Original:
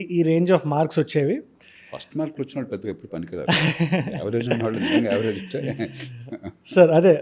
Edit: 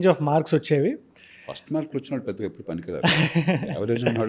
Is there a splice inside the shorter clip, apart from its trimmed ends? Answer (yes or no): no